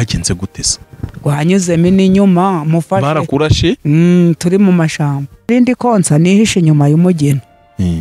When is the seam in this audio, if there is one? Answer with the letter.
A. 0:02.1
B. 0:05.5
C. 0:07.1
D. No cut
B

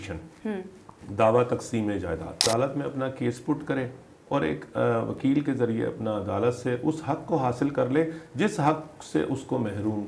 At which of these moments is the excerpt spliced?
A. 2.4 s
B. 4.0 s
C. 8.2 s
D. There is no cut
A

